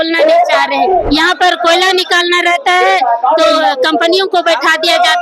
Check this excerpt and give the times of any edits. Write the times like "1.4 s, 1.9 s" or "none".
1.1 s